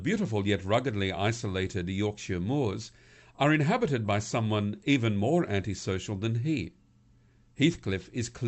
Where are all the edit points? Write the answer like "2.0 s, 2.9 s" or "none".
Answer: 6.0 s